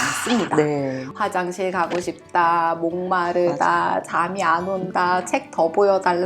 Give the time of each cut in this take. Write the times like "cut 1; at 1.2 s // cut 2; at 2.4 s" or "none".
cut 1; at 1.1 s